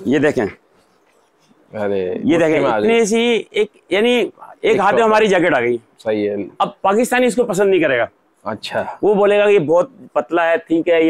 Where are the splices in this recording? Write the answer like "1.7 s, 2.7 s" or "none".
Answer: none

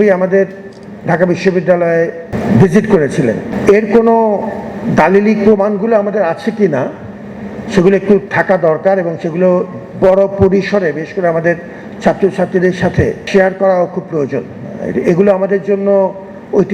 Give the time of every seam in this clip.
3.5 s, 13.3 s

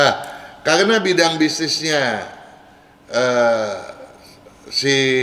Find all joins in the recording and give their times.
none

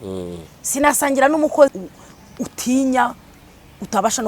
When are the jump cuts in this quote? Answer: 1.7 s

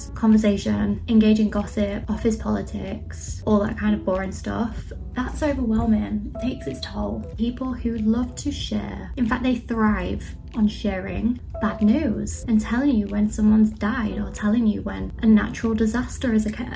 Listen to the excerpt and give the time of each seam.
7.3 s, 9.0 s, 11.5 s, 12.3 s

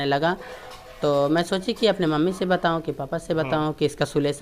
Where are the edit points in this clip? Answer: none

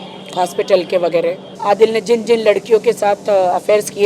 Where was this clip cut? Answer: 1.5 s

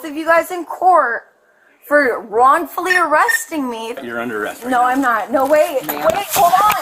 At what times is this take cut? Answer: 4.0 s

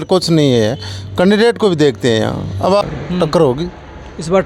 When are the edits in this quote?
2.8 s

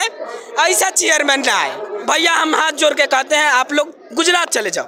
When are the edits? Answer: none

